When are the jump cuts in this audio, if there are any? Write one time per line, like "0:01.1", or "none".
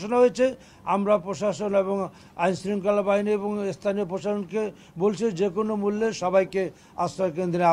none